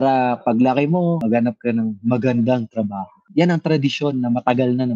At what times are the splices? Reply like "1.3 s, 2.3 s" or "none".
none